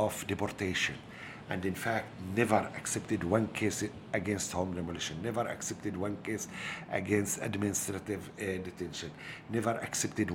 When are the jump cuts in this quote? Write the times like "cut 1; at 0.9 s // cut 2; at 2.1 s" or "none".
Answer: none